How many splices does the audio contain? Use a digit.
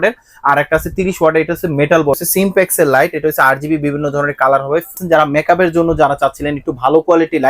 2